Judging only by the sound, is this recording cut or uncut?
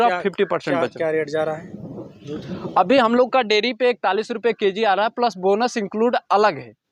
uncut